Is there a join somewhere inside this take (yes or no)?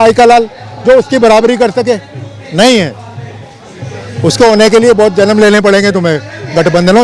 no